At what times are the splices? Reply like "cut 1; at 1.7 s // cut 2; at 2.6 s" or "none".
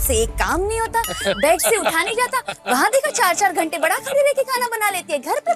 none